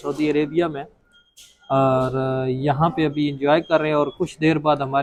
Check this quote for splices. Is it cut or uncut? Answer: uncut